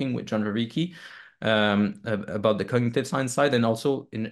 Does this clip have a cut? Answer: no; 0 cuts

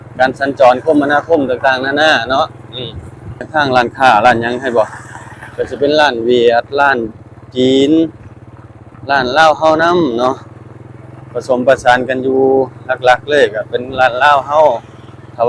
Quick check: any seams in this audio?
yes; 1 cut; at 3.4 s

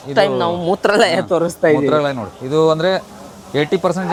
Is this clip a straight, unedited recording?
yes; 0 cuts

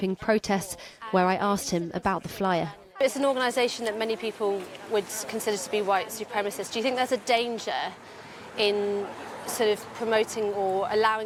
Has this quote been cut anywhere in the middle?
no; 0 cuts

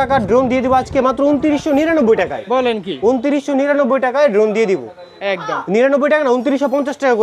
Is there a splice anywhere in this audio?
no; 0 cuts

